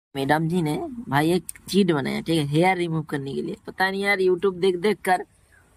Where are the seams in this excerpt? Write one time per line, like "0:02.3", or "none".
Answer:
none